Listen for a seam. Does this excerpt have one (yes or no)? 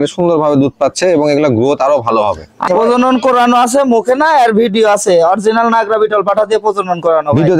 yes